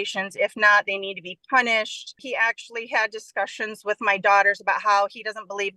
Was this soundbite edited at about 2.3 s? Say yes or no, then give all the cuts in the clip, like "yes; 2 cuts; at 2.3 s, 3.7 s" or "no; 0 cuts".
yes; 1 cut; at 2.3 s